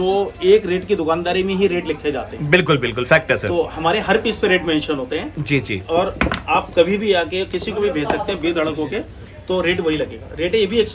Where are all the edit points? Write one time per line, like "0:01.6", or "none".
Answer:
none

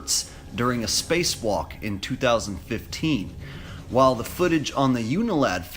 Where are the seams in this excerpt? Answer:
0:01.5

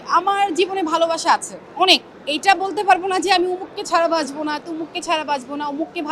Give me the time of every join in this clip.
none

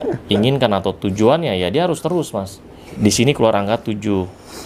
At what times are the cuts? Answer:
0:02.9

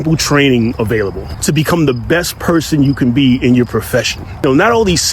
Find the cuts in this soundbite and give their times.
0:01.3
0:04.4

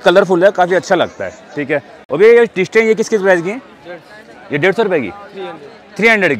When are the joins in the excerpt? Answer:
none

